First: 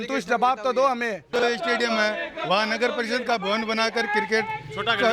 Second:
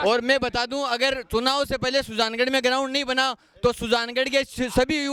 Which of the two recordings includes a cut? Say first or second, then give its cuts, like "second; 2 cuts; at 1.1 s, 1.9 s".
first; 1 cut; at 1.2 s